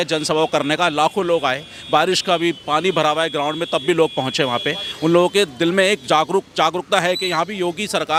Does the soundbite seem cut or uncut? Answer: uncut